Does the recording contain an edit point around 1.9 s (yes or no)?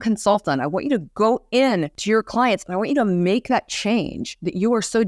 yes